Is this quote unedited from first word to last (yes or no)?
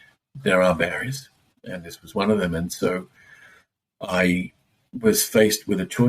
yes